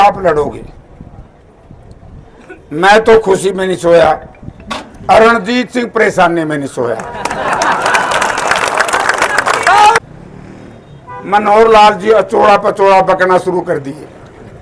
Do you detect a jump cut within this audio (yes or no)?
yes